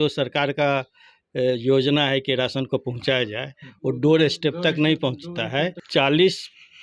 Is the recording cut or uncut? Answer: cut